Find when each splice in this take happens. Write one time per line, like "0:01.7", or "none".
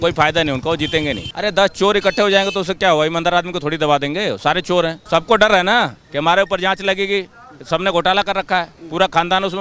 0:01.3
0:05.0